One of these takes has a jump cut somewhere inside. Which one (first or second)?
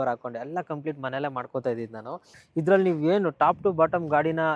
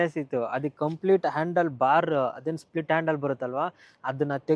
first